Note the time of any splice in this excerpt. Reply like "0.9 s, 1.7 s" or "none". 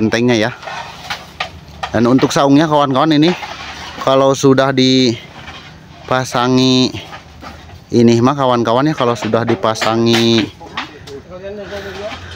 none